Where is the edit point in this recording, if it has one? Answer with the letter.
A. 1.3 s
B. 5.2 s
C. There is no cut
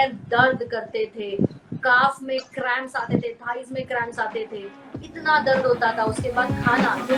C